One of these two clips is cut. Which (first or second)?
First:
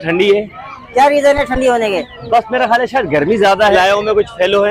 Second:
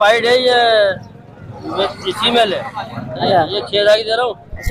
first